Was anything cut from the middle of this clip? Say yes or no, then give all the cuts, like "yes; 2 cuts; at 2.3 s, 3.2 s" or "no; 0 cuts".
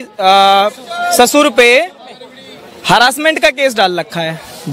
no; 0 cuts